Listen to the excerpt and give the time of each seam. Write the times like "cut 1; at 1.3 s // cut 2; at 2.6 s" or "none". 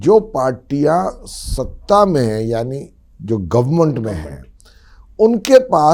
none